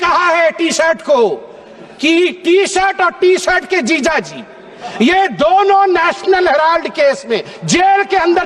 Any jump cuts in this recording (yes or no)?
no